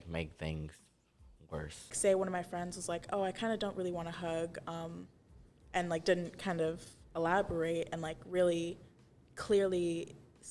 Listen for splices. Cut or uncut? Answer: cut